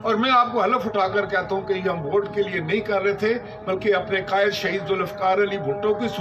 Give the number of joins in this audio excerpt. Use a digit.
0